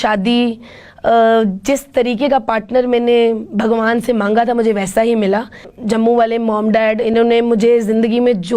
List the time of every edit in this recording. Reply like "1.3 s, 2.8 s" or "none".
5.7 s

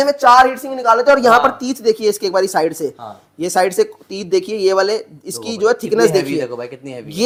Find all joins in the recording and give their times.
none

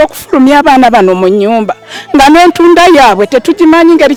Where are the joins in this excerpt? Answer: none

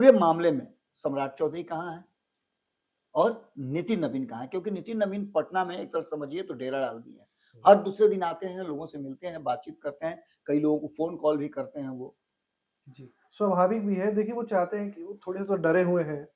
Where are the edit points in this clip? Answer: none

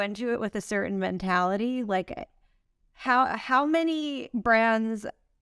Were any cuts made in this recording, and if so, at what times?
none

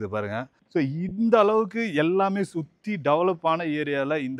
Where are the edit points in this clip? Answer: none

